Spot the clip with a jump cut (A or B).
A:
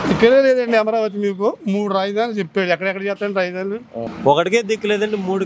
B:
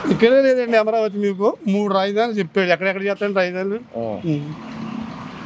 A